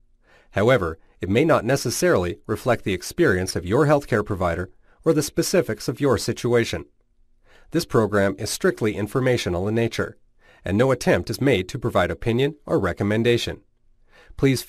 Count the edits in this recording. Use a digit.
1